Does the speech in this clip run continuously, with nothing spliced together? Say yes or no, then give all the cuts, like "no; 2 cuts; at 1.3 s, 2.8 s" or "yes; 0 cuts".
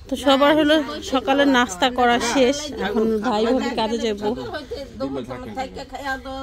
yes; 0 cuts